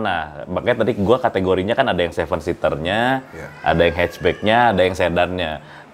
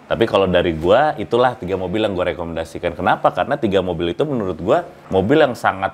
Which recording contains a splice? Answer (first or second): second